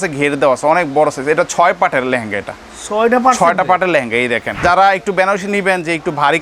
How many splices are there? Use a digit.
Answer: 1